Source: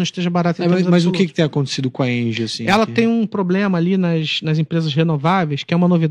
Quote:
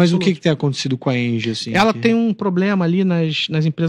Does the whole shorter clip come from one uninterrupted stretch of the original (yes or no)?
yes